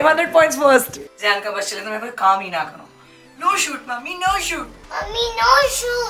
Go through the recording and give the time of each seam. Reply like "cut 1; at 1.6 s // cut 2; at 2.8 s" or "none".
cut 1; at 1.0 s // cut 2; at 4.8 s